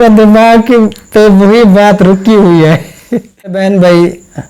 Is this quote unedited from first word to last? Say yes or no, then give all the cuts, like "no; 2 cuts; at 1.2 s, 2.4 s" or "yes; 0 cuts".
no; 1 cut; at 3.6 s